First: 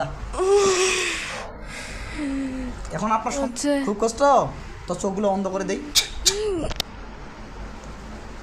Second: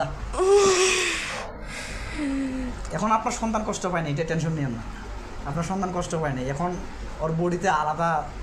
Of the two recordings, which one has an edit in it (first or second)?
first